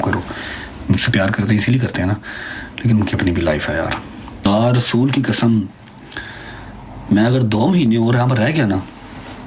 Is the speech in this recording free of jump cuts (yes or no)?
no